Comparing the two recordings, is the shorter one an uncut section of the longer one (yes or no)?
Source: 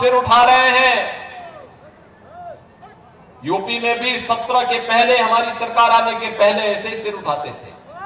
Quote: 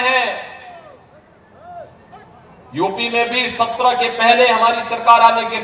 yes